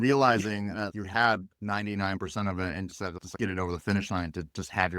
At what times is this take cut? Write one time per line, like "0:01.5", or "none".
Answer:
0:00.9

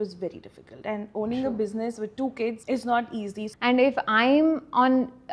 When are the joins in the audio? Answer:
0:02.6
0:03.4

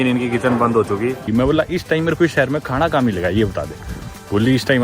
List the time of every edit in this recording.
0:01.2

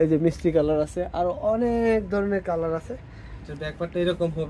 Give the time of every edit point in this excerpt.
0:03.4

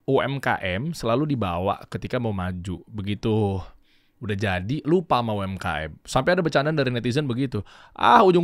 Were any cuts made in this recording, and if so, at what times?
none

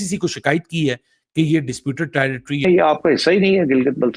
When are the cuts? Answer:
0:02.6

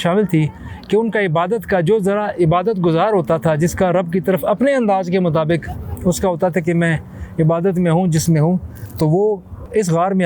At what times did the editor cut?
none

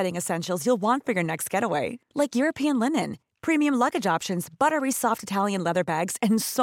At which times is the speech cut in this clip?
none

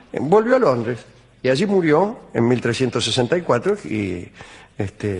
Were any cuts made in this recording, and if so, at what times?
0:02.4

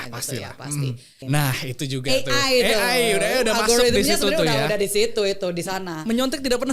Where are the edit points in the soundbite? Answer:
0:01.2

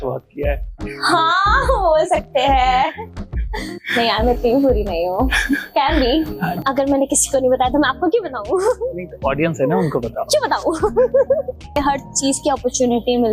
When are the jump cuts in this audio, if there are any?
0:06.6
0:11.8

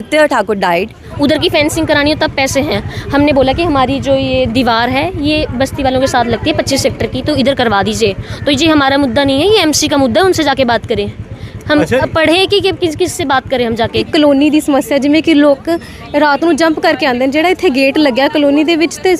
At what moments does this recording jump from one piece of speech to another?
0:01.0
0:14.1

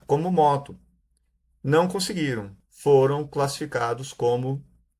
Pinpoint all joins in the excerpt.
0:02.5

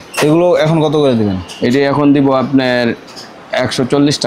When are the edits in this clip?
none

